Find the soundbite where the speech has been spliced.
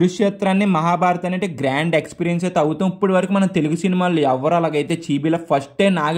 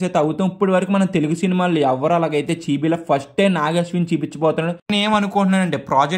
second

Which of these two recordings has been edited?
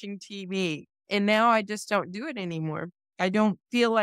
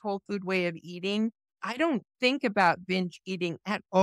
first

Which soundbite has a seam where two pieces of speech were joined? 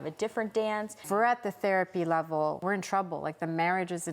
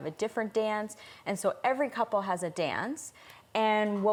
first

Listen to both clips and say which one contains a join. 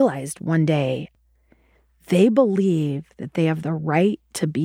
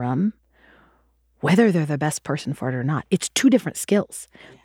first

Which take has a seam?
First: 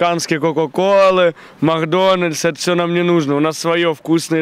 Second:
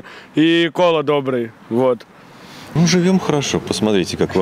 second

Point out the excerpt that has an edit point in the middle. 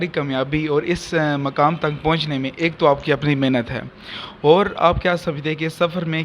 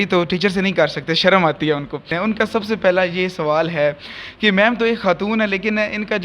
second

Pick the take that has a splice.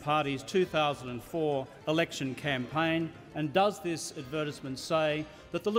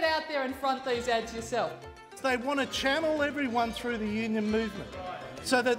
second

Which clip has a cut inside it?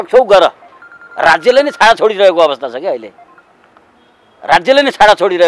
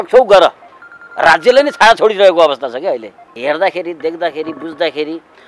second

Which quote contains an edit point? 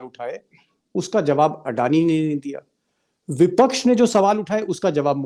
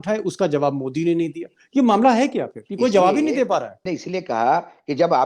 second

